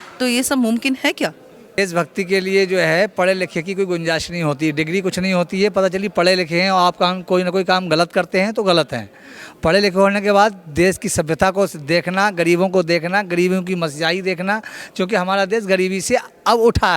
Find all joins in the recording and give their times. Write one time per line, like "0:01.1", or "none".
0:01.8